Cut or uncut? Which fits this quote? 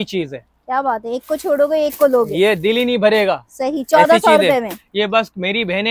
uncut